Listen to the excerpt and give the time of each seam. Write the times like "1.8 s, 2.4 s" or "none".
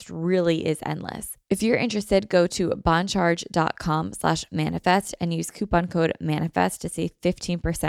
1.3 s